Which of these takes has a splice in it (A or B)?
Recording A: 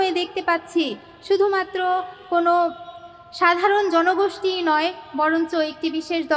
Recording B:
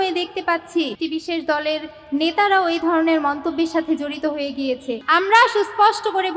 B